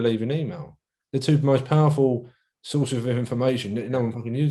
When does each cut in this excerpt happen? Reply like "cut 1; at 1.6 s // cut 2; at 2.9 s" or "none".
none